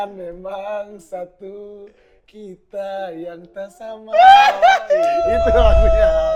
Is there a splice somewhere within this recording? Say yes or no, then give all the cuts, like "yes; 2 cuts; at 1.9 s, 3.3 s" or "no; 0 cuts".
no; 0 cuts